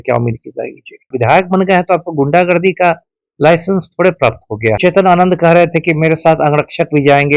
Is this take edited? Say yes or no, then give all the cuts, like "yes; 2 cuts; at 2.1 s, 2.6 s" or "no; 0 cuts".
yes; 2 cuts; at 1.1 s, 4.8 s